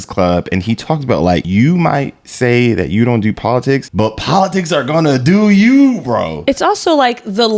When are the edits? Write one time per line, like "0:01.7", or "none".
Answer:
0:01.5
0:03.9
0:06.4